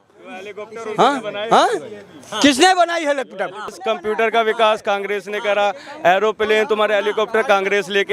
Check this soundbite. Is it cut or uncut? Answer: cut